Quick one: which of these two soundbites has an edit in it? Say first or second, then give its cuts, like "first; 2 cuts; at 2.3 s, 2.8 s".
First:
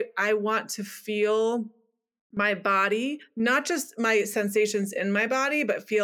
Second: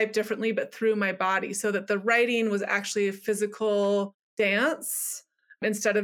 second; 1 cut; at 4.2 s